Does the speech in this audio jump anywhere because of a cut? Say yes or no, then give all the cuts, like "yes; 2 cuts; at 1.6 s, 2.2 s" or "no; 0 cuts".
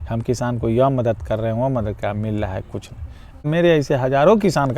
yes; 1 cut; at 3.4 s